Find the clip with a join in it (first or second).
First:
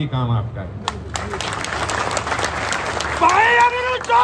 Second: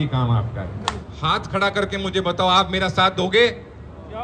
second